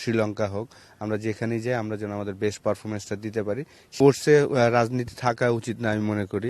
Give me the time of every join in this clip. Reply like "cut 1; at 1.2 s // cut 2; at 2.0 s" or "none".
cut 1; at 3.9 s